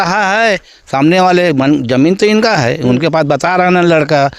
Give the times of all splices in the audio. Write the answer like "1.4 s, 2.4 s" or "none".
none